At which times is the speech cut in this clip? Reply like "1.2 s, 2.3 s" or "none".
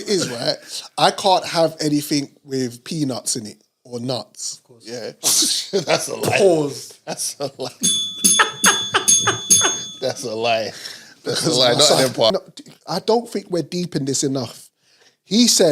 12.3 s